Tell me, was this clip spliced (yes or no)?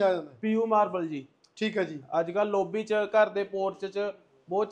no